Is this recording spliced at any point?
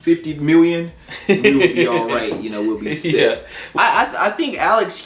yes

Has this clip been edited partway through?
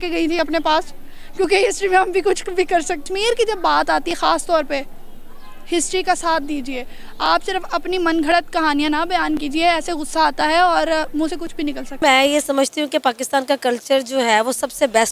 yes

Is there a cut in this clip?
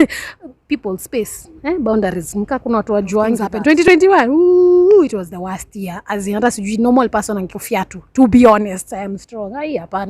yes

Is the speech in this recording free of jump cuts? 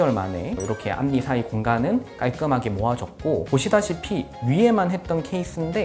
yes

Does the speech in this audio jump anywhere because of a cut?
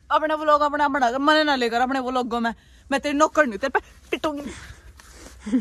no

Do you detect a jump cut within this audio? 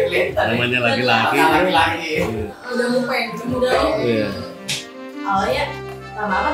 no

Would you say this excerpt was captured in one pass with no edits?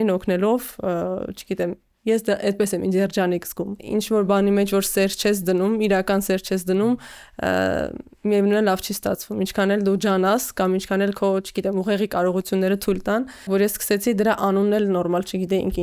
no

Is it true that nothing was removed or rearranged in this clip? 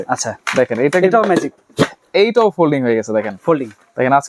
yes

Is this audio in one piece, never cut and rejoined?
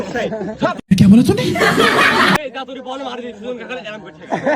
no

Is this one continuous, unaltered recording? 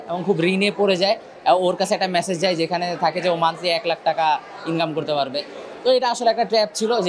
yes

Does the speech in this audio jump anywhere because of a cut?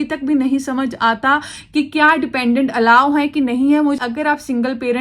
yes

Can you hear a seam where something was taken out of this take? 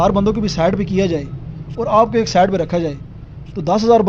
no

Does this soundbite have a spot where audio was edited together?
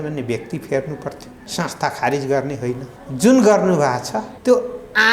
yes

